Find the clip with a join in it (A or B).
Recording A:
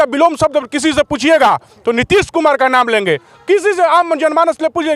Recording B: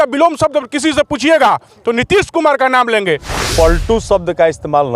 B